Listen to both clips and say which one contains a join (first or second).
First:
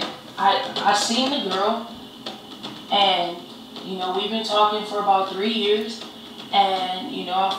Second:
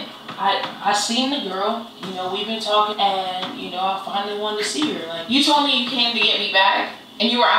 second